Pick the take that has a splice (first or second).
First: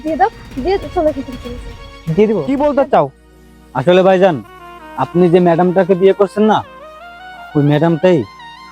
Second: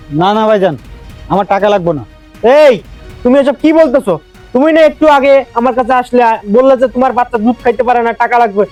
first